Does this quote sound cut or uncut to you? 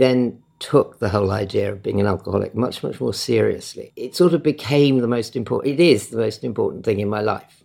uncut